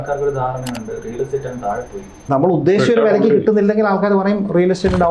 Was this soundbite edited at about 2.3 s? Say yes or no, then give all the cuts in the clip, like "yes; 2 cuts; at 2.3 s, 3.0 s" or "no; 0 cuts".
yes; 1 cut; at 2.3 s